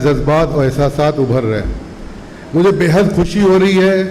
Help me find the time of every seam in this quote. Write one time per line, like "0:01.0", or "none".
none

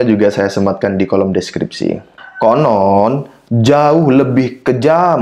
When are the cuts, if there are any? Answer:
0:02.2

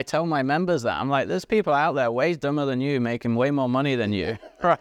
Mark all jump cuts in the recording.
none

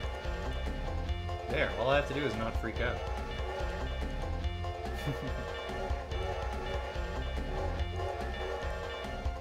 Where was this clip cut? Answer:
none

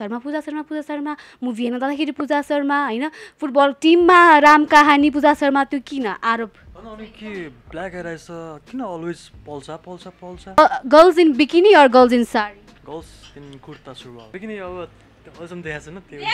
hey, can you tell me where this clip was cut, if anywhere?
0:10.6
0:12.7
0:14.2

